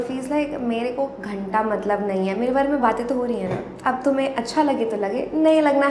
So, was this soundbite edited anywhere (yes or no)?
no